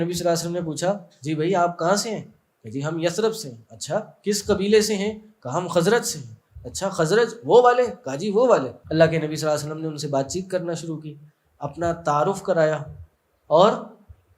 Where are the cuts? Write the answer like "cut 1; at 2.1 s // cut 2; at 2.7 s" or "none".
cut 1; at 8.8 s